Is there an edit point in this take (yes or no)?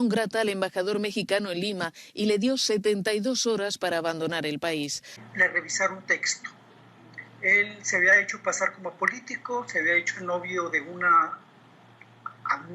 yes